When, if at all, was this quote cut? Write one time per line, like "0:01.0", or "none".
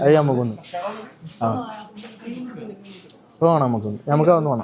none